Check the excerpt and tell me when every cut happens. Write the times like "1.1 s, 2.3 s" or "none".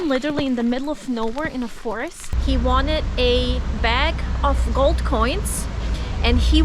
2.2 s